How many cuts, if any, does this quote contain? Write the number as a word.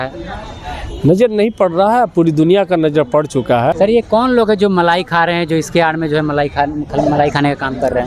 one